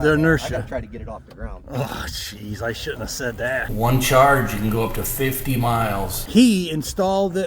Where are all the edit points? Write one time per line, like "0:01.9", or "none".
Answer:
0:03.7
0:06.2